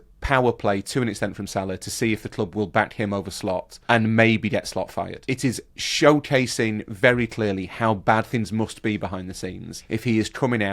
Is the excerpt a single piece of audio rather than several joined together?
no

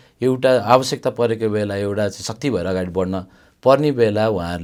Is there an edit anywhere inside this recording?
no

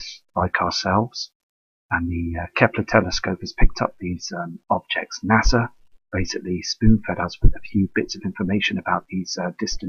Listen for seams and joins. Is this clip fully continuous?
no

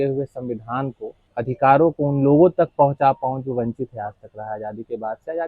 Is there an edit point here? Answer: yes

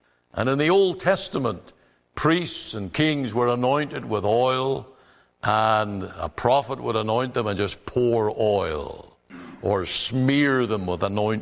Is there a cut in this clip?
no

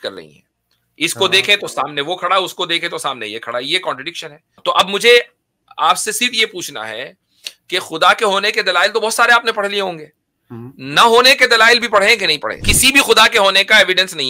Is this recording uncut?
no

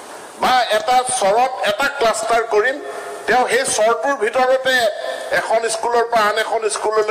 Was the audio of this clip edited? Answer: no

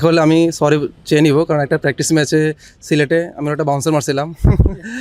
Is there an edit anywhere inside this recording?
no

